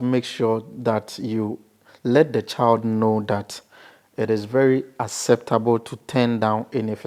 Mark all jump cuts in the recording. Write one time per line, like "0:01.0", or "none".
none